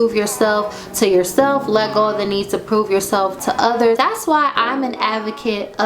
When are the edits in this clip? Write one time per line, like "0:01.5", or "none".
0:04.0